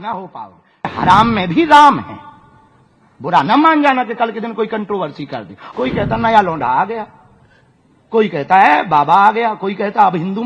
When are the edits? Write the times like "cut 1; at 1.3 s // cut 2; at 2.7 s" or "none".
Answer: cut 1; at 0.9 s // cut 2; at 5.6 s

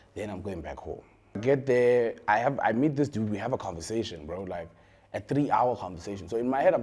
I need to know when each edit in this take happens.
cut 1; at 1.4 s

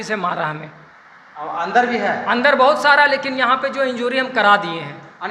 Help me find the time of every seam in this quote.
none

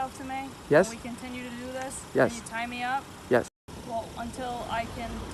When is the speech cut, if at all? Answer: cut 1; at 3.8 s

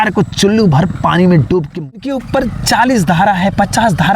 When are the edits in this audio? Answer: cut 1; at 2.0 s

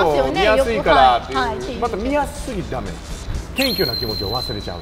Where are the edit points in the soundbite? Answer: none

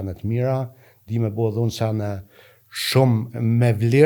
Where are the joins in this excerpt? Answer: none

